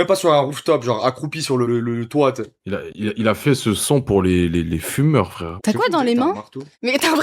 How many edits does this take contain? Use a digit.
2